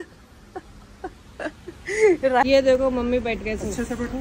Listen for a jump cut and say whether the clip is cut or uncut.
cut